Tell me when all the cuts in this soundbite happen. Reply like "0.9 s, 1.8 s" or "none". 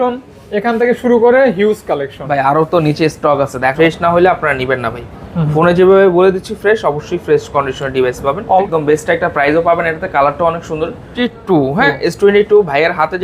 3.7 s, 8.7 s, 11.1 s